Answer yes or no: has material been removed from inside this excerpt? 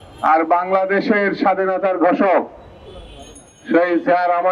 no